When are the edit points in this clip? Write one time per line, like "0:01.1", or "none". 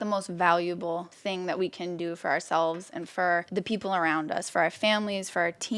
0:01.1
0:03.5